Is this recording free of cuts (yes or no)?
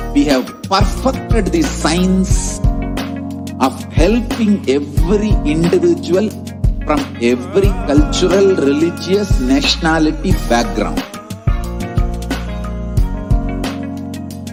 yes